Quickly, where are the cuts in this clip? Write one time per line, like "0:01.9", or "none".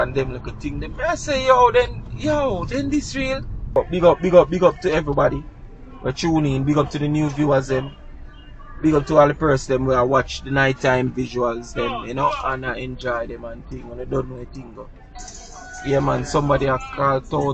0:03.7